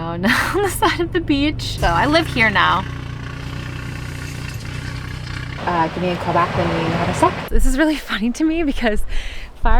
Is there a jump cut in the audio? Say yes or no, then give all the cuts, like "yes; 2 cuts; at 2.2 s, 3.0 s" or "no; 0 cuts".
yes; 3 cuts; at 1.7 s, 5.5 s, 7.5 s